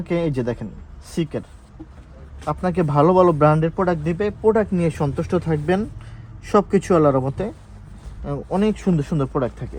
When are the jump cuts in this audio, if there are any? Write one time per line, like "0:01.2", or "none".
none

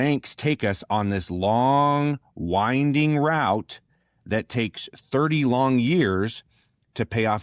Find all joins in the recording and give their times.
none

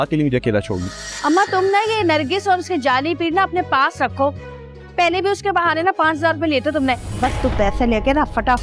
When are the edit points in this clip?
0:01.1
0:07.1

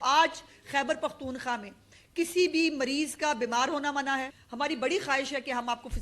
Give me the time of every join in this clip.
0:04.4

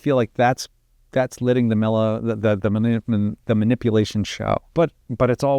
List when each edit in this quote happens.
0:04.7

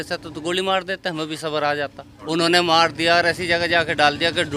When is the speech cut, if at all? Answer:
0:02.1

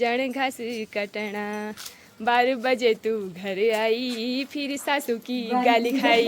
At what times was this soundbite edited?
none

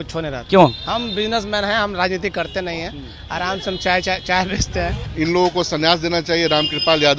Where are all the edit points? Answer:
0:05.0

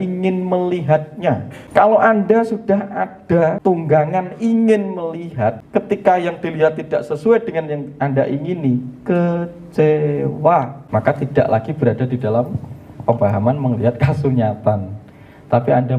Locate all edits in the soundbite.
0:01.5
0:03.6
0:05.6
0:10.8

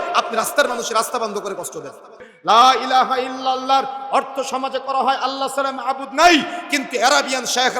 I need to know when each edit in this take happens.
0:02.3

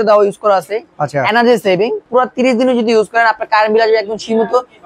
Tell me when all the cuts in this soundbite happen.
0:02.0

